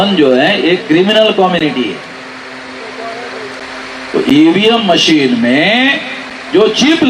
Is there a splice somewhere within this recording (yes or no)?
yes